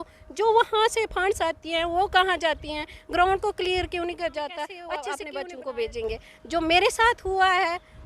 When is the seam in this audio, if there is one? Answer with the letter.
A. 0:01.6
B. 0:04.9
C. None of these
B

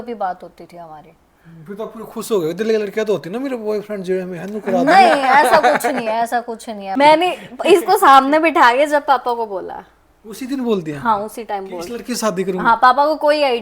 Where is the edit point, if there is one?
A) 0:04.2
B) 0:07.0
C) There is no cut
B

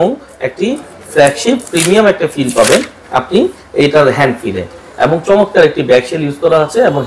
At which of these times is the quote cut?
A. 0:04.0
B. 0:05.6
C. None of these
C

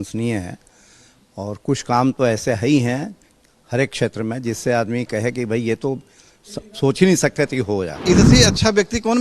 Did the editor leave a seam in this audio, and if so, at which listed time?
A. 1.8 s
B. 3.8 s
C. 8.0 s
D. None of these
C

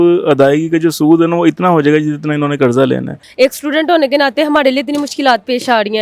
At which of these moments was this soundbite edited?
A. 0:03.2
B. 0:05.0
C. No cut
A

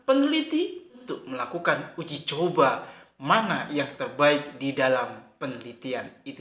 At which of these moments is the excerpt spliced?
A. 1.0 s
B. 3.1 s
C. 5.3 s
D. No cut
A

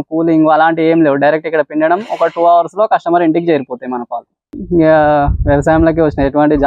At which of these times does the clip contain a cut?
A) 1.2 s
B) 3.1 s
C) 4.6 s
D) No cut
C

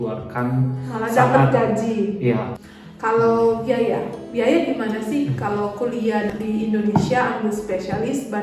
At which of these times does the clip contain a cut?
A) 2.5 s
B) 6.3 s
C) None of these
A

